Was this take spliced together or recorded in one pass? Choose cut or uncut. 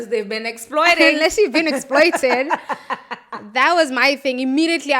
uncut